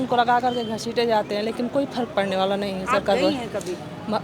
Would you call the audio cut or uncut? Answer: uncut